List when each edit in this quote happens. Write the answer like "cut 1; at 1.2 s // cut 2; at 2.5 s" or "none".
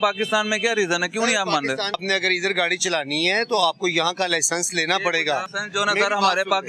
cut 1; at 2.0 s // cut 2; at 5.6 s